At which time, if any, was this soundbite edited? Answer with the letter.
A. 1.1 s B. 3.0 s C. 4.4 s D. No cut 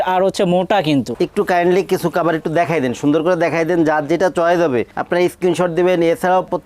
A